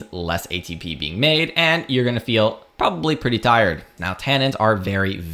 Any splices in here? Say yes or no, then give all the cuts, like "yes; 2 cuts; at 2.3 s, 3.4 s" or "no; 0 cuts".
yes; 1 cut; at 3.8 s